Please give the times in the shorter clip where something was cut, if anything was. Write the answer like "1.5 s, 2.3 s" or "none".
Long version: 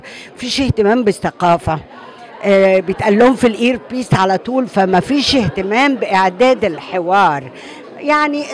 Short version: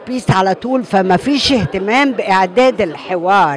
none